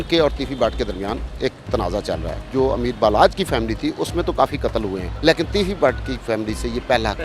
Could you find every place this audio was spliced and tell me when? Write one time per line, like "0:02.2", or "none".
0:02.5
0:05.1